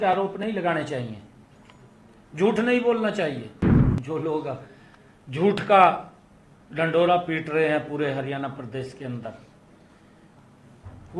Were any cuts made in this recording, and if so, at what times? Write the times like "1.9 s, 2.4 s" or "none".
3.9 s

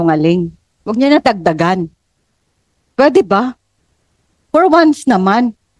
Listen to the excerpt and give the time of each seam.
none

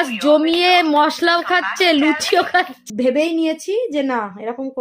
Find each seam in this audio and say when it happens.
2.8 s

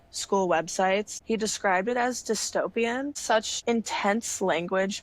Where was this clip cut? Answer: 3.4 s

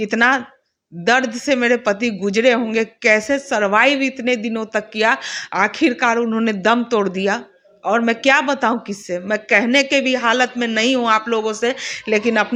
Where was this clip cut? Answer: none

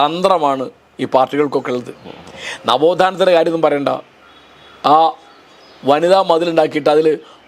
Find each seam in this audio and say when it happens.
none

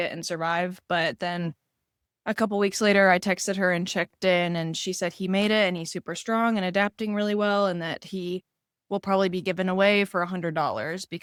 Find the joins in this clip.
none

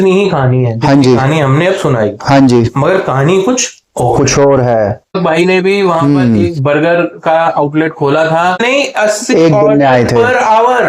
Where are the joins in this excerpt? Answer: 5.2 s, 8.6 s

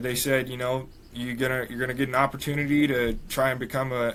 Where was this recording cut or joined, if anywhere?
none

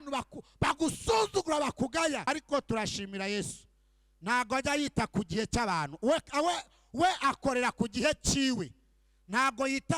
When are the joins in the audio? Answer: 2.3 s

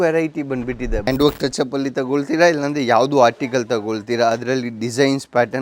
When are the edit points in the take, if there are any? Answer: 1.1 s

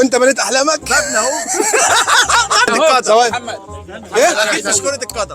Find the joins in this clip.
2.7 s

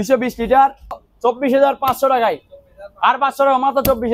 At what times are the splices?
1.1 s

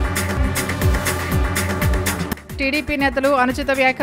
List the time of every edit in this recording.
2.3 s

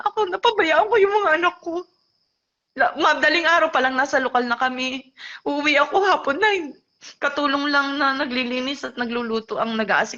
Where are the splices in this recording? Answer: none

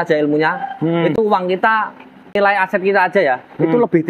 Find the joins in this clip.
2.3 s

